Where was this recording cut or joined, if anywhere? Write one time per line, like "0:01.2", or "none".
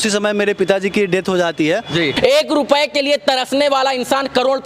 0:02.1

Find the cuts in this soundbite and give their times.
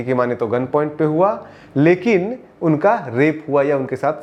none

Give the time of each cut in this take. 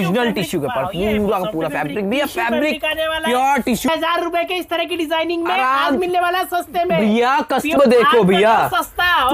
0:03.9
0:07.8

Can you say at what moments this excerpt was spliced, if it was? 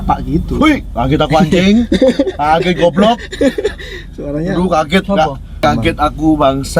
0:05.6

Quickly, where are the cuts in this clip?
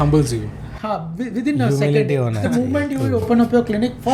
none

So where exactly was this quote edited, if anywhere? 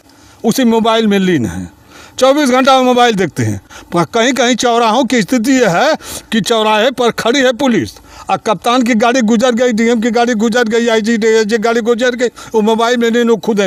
none

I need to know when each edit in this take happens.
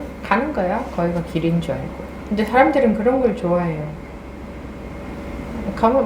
none

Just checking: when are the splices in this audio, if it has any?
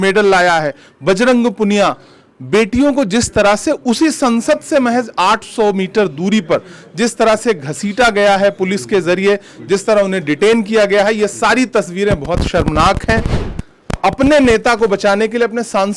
0:13.4

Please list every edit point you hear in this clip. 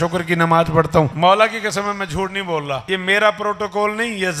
0:01.1
0:02.8

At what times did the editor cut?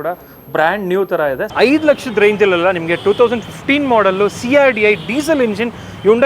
0:01.5

